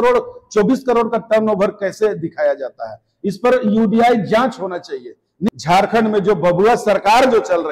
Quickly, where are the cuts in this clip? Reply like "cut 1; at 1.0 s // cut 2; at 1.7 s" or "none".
cut 1; at 5.4 s